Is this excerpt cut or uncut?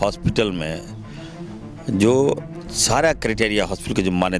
uncut